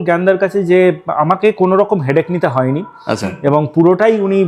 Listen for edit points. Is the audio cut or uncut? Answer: uncut